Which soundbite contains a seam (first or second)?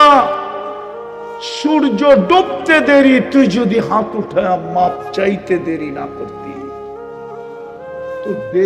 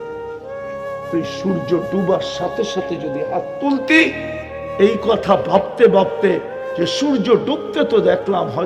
second